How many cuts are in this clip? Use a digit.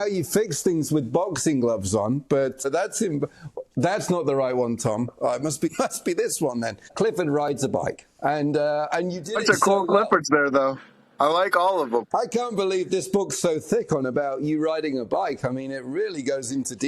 4